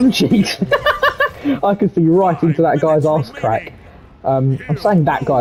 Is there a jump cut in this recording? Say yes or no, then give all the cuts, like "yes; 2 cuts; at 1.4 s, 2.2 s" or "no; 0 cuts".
no; 0 cuts